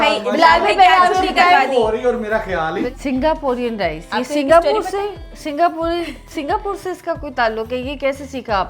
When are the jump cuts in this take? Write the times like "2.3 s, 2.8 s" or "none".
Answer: 2.8 s